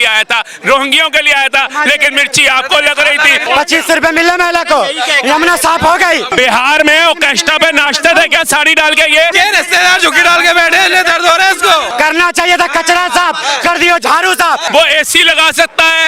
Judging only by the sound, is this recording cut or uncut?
cut